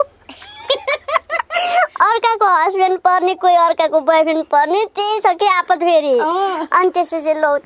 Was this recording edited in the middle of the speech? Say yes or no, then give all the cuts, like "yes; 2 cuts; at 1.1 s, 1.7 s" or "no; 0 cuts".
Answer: no; 0 cuts